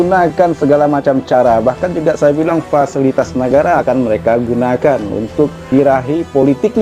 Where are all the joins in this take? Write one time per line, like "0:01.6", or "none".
0:05.7